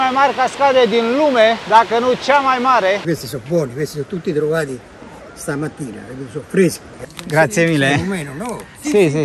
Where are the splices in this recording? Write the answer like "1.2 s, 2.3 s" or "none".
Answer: 3.0 s, 6.9 s